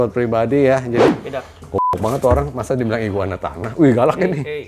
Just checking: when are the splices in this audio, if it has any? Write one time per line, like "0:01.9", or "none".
0:01.1